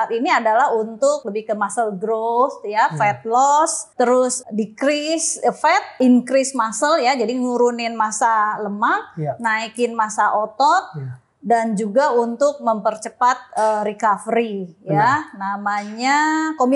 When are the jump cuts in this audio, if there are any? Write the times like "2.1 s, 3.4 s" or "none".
1.2 s, 4.1 s, 6.0 s